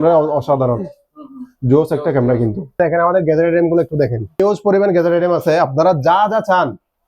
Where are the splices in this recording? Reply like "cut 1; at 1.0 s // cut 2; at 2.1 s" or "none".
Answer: cut 1; at 2.8 s // cut 2; at 4.4 s

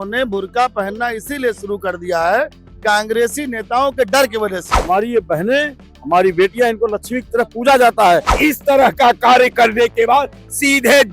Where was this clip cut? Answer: cut 1; at 4.7 s // cut 2; at 8.3 s

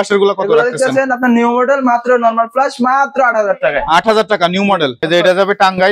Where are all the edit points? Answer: cut 1; at 5.0 s

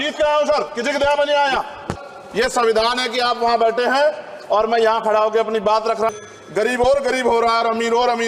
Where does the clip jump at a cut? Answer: cut 1; at 2.0 s // cut 2; at 6.1 s

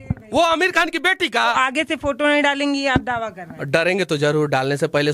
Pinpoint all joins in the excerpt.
cut 1; at 1.5 s

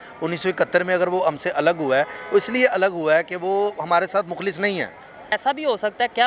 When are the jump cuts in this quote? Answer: cut 1; at 5.3 s

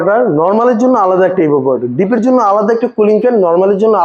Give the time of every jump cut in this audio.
none

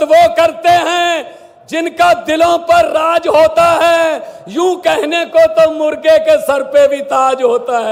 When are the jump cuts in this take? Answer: none

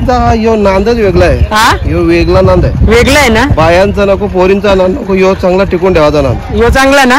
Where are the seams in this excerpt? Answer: none

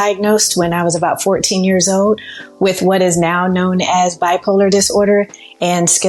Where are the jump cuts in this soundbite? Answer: none

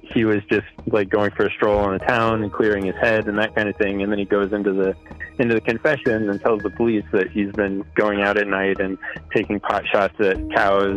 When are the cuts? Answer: none

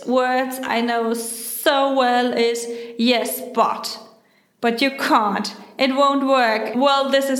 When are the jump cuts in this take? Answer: none

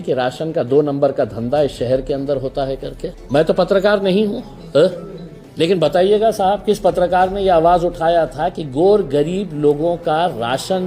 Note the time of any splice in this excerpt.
cut 1; at 3.1 s

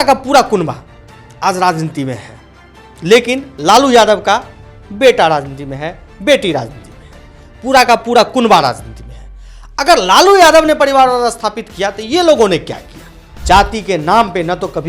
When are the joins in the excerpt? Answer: cut 1; at 13.3 s

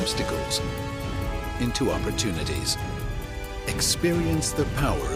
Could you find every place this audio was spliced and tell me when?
none

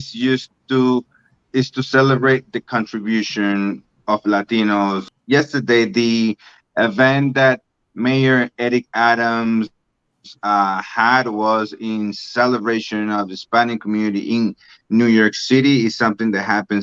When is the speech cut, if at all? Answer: cut 1; at 5.1 s

